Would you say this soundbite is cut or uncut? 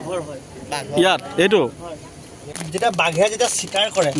cut